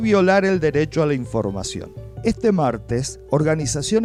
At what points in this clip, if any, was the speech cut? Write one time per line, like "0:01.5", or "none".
none